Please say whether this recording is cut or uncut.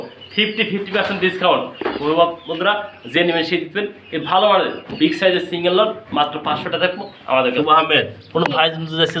cut